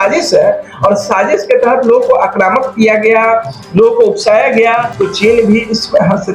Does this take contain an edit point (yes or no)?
yes